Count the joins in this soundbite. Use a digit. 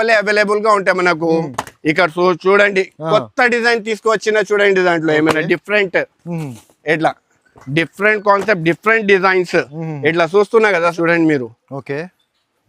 1